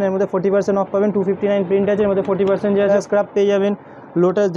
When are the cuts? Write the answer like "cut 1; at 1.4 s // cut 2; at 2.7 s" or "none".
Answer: cut 1; at 2.9 s